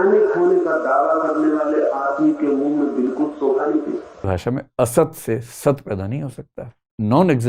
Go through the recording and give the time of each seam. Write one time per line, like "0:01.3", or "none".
0:04.3